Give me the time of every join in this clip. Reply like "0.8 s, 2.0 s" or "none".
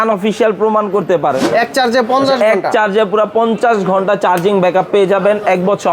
1.4 s